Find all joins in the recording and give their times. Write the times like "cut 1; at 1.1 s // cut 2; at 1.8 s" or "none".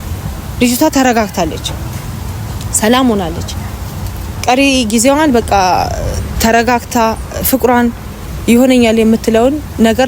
none